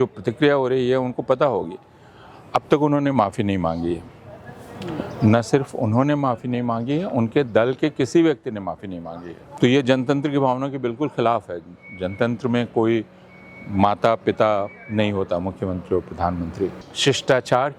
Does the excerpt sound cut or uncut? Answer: cut